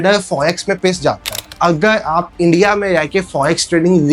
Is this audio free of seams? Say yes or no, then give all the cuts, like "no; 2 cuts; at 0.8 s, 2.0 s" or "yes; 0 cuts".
no; 1 cut; at 1.4 s